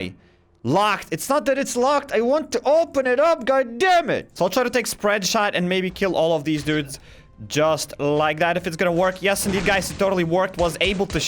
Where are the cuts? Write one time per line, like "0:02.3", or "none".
0:04.3